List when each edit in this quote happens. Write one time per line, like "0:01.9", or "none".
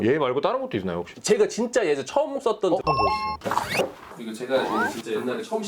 0:02.8
0:04.1